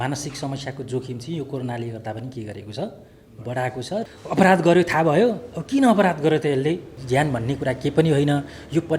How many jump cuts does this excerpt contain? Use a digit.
2